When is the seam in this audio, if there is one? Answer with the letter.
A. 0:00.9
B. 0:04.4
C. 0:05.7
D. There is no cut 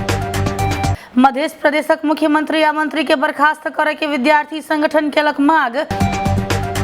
A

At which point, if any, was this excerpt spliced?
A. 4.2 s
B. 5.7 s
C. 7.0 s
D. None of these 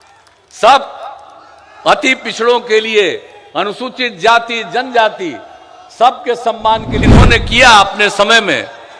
C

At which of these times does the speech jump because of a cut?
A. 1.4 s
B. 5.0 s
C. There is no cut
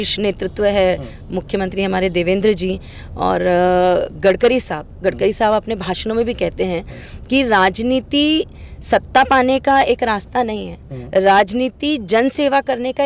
C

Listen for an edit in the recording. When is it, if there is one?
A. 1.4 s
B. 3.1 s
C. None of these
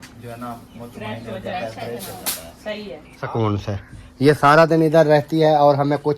B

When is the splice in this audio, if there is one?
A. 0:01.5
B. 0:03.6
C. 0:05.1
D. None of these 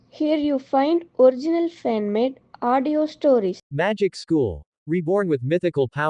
B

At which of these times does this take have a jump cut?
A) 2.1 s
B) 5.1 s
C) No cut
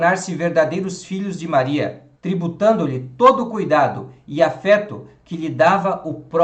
A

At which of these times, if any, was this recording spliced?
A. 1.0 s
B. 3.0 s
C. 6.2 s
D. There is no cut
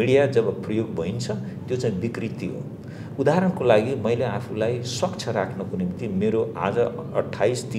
D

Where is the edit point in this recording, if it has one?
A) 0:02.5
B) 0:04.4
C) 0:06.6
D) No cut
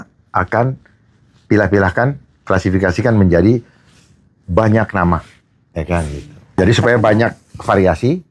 C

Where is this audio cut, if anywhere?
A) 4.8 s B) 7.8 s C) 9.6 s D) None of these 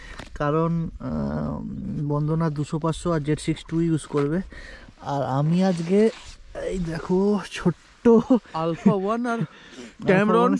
D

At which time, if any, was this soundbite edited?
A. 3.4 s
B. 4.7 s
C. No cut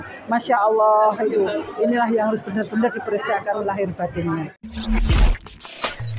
B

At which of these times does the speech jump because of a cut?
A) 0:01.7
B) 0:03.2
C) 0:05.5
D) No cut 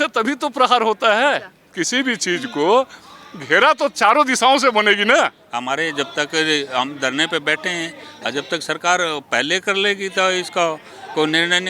C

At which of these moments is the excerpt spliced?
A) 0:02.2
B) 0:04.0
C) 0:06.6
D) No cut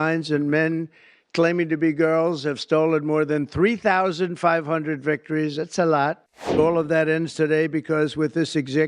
C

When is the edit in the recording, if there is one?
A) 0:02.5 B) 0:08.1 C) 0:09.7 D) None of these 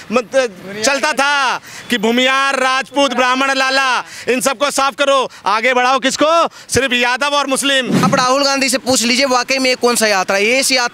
B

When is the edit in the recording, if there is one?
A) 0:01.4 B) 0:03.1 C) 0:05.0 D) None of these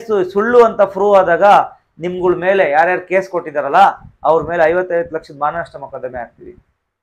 D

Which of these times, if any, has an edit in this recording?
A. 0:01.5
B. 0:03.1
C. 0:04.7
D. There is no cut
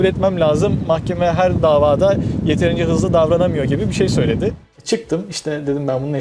C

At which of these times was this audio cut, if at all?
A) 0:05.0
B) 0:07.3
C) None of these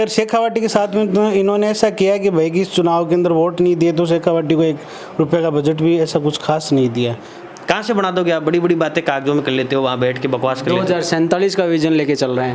B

